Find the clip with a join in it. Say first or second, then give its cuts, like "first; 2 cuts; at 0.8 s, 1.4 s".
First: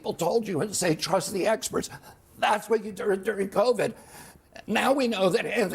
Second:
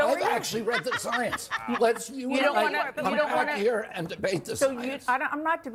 first; 1 cut; at 1.9 s